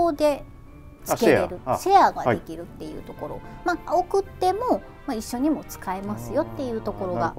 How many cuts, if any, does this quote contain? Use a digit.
0